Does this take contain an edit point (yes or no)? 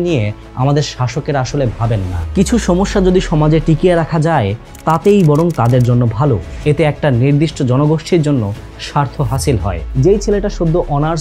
yes